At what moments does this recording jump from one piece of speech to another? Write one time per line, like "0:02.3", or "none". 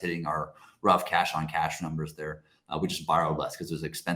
none